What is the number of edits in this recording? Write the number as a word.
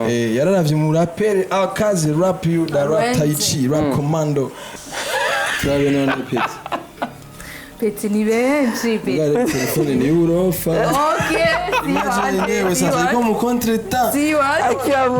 one